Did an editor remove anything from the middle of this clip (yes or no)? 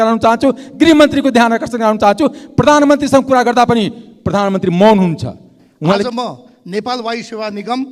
yes